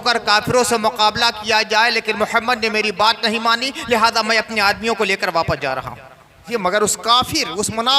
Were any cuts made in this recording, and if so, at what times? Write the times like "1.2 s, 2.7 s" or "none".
6.4 s